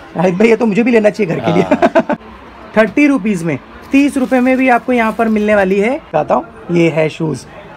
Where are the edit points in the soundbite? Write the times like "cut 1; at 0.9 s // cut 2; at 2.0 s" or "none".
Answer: cut 1; at 2.3 s // cut 2; at 6.0 s